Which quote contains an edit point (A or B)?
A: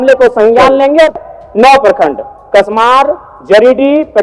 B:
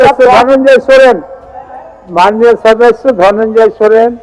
A